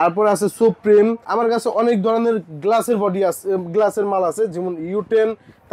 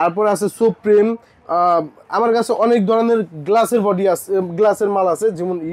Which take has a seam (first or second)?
first